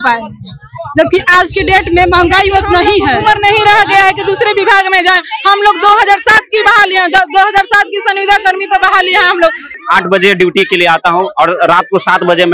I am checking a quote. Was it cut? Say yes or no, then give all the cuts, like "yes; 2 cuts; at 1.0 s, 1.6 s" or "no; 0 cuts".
yes; 1 cut; at 9.7 s